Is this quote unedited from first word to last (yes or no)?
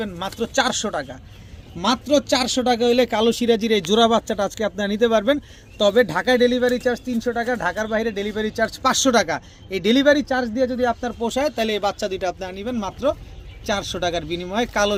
yes